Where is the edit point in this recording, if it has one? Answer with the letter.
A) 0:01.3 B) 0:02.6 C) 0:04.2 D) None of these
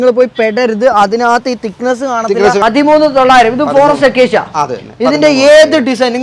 B